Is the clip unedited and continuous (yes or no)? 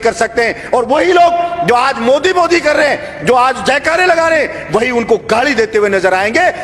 yes